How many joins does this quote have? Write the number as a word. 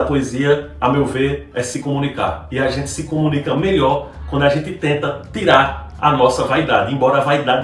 zero